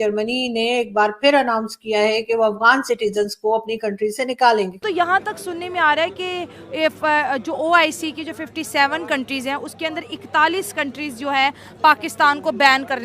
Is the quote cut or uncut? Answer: cut